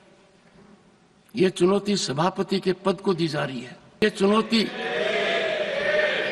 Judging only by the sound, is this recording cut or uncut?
cut